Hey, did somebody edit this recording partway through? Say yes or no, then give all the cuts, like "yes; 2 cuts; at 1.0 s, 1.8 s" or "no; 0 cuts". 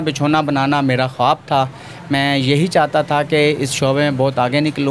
no; 0 cuts